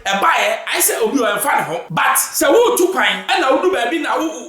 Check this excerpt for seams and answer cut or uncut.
cut